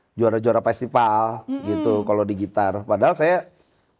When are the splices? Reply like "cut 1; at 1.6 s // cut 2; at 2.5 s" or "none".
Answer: none